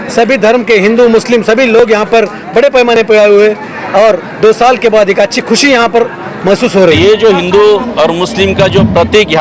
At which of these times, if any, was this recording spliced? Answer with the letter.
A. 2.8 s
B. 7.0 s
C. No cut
B